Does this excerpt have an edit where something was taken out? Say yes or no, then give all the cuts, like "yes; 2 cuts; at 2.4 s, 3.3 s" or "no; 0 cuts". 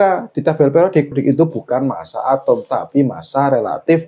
yes; 1 cut; at 1.1 s